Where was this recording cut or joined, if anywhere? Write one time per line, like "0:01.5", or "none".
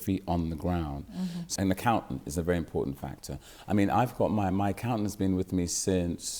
0:01.5